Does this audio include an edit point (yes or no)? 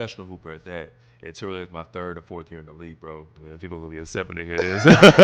yes